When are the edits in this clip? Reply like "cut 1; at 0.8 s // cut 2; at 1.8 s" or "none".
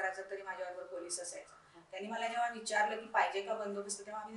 none